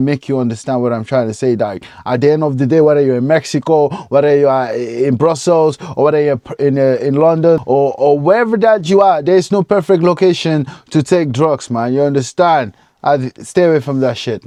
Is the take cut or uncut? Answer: uncut